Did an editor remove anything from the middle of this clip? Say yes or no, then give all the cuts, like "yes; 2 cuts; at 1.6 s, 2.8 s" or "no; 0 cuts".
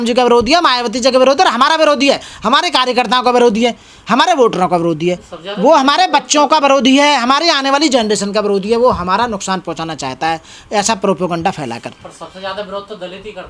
no; 0 cuts